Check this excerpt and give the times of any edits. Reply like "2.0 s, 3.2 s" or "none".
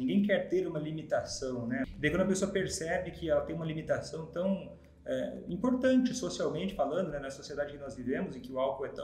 1.9 s